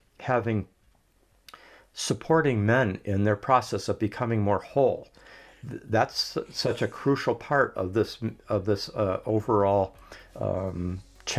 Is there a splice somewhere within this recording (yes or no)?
no